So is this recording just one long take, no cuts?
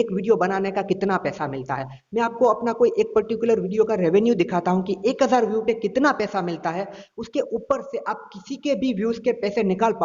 yes; 0 cuts

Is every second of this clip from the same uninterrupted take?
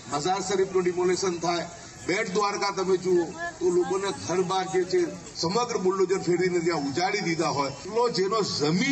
no; 1 cut; at 7.8 s

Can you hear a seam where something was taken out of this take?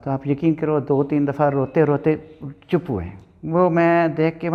no; 0 cuts

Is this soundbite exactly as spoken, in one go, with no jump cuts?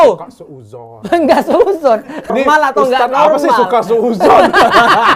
no; 1 cut; at 2.3 s

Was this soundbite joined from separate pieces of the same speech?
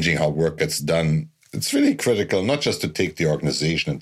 no; 0 cuts

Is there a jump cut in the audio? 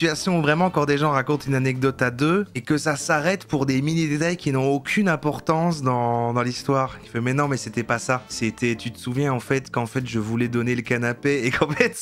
no; 0 cuts

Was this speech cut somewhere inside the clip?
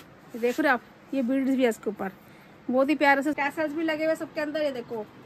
yes; 1 cut; at 3.3 s

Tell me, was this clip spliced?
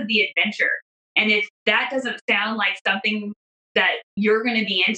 yes; 2 cuts; at 1.5 s, 4.1 s

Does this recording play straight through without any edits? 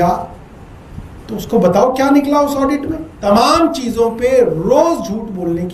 no; 1 cut; at 3.2 s

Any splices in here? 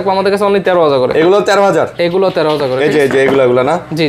no; 0 cuts

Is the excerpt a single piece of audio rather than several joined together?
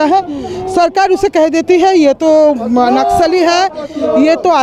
yes; 0 cuts

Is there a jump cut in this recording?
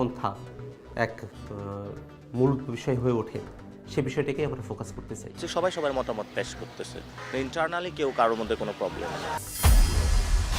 yes; 1 cut; at 9.6 s

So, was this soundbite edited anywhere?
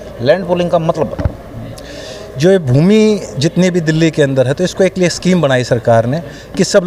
no; 0 cuts

